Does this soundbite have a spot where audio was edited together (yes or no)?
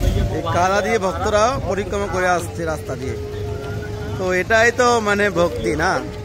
no